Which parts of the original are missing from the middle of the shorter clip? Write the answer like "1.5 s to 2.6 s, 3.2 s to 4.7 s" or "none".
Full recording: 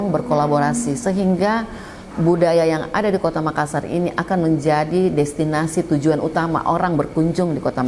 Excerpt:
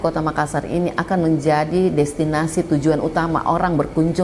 none